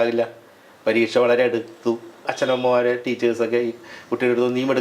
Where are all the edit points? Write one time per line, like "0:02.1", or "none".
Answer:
0:02.3